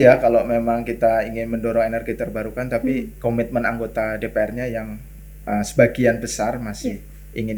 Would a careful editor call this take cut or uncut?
uncut